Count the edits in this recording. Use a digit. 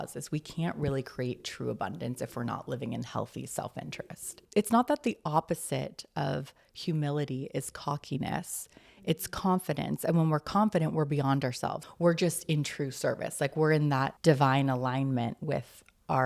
3